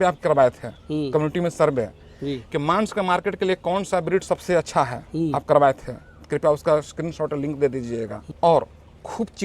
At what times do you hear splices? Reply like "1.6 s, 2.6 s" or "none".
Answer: 8.2 s